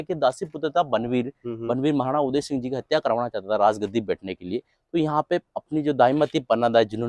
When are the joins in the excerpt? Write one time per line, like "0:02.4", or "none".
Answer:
none